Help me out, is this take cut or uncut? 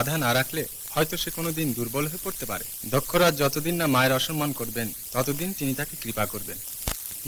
cut